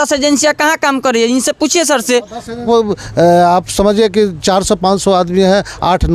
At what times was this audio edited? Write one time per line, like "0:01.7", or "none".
0:02.6